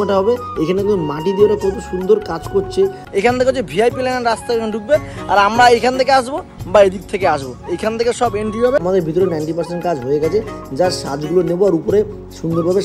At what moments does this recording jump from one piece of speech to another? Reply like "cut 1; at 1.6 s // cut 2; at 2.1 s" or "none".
cut 1; at 3.0 s // cut 2; at 8.8 s